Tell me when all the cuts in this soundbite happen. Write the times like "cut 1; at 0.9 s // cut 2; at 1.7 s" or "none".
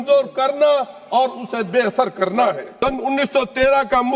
cut 1; at 2.7 s